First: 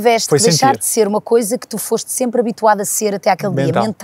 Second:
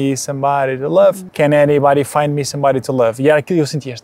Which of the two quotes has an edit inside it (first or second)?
second